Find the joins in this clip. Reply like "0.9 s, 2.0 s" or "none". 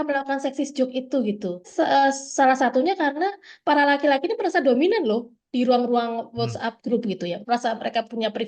1.7 s, 3.5 s, 7.4 s